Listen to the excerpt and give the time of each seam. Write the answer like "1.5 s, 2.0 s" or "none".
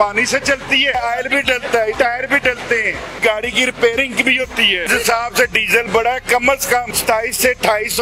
0.9 s, 1.9 s, 3.2 s, 4.9 s, 6.9 s